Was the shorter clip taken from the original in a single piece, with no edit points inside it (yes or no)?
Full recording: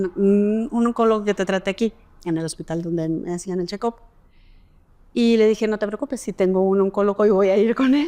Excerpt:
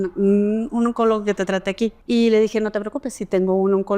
no